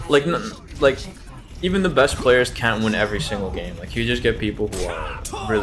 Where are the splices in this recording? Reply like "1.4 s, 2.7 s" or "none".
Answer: none